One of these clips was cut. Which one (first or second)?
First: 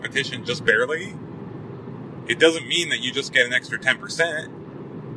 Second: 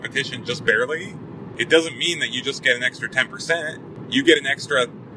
second